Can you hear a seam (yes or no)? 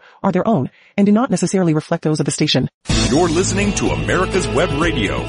yes